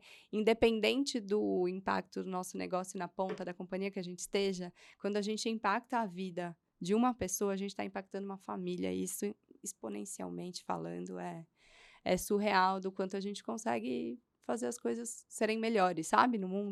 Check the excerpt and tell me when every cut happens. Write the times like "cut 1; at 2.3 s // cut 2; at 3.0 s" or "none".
none